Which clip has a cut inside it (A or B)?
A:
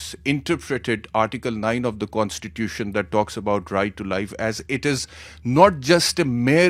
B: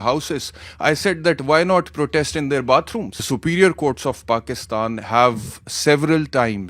B